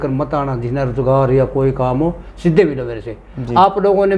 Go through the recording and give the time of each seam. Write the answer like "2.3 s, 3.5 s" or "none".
none